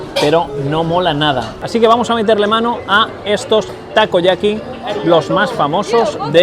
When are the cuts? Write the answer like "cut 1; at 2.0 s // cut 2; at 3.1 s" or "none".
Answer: cut 1; at 1.6 s